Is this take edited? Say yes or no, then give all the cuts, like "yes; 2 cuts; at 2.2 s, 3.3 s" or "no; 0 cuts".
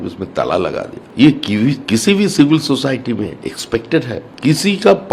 yes; 2 cuts; at 1.0 s, 4.3 s